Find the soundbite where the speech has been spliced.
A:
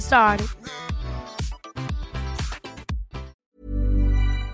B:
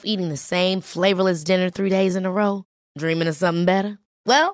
A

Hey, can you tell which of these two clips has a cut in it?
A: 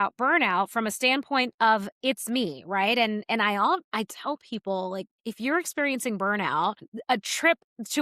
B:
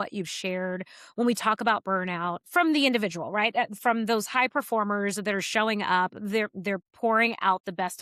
A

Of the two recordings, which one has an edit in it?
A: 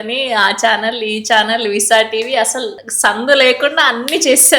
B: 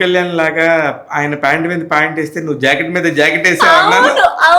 A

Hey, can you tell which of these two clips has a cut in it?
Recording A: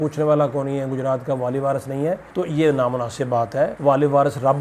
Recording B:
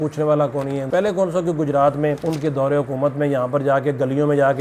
B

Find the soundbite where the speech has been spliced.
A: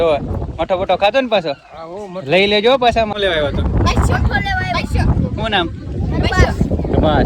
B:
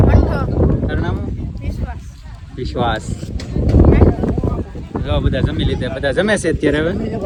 A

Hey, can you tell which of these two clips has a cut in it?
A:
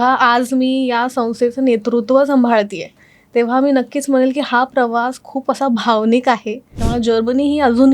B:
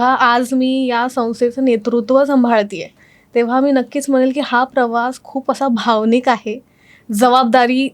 A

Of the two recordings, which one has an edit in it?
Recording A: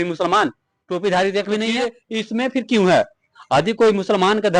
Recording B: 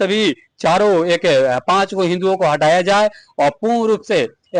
A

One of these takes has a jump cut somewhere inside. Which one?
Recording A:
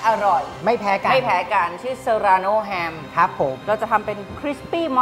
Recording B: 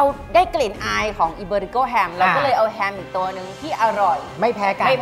A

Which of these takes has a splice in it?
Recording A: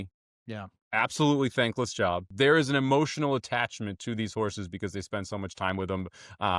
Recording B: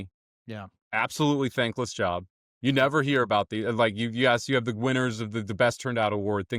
A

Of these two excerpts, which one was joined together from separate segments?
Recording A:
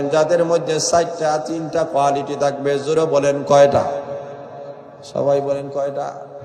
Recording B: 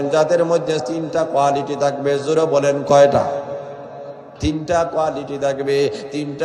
B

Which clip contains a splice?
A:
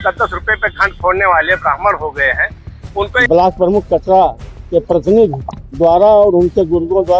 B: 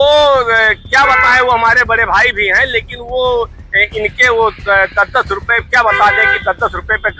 A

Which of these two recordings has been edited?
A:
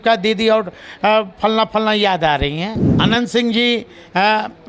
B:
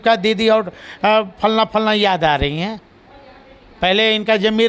A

